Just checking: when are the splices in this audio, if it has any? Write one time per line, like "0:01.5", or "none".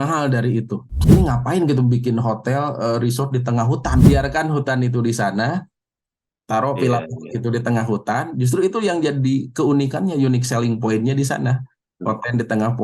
0:01.0
0:04.0